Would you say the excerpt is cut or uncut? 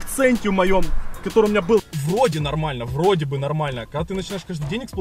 cut